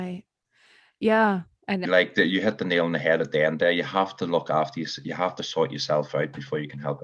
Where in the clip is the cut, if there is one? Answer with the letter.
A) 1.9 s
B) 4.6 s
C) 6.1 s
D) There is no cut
A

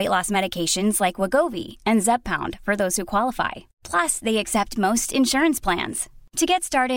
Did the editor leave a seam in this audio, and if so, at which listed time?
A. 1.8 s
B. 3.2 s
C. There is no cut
C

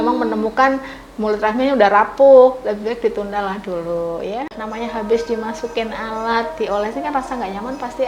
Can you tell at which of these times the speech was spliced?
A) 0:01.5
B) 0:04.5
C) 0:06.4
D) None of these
B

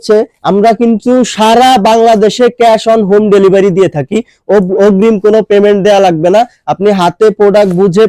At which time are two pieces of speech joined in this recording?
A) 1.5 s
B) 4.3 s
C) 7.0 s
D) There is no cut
D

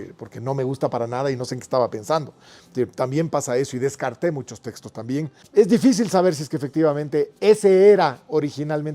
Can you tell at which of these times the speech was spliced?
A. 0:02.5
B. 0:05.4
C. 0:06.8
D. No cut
B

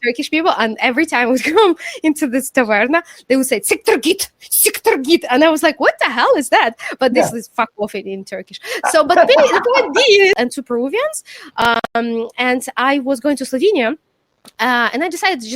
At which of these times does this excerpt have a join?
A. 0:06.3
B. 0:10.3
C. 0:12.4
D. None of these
B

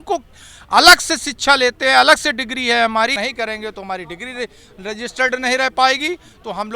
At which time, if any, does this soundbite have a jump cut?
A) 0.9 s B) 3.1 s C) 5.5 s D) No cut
B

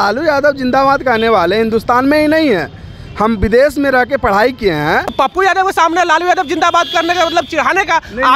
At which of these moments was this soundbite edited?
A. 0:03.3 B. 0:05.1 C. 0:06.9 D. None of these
B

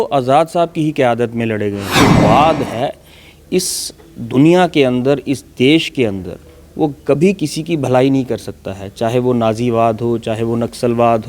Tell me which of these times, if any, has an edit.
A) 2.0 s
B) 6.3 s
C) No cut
A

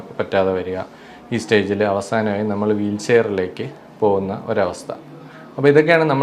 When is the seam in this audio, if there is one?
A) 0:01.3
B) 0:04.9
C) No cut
C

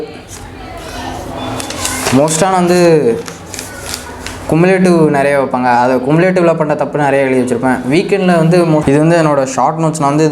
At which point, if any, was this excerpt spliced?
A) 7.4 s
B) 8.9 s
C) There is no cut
B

